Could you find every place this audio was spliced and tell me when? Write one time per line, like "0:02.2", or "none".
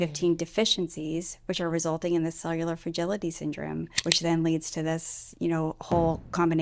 0:03.9